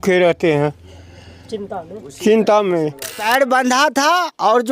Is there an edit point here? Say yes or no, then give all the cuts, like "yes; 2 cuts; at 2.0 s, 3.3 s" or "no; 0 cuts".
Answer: yes; 1 cut; at 3.2 s